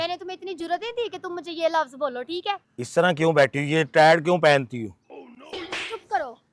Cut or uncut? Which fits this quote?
cut